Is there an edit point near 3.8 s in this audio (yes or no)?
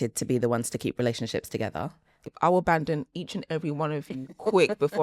no